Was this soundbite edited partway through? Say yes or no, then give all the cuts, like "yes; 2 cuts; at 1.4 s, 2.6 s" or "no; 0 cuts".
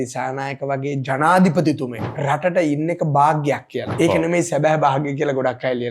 yes; 1 cut; at 3.9 s